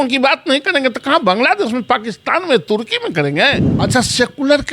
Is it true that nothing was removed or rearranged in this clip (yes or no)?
no